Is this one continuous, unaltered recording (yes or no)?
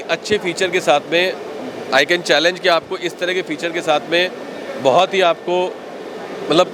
yes